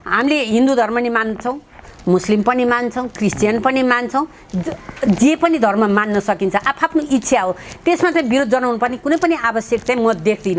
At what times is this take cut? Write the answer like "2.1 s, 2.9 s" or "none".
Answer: none